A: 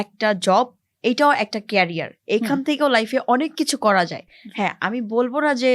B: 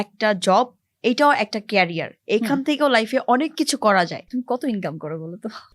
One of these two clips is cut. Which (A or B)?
B